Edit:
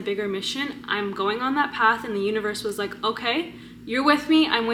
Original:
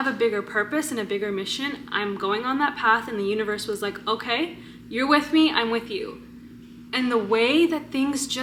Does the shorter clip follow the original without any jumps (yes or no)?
yes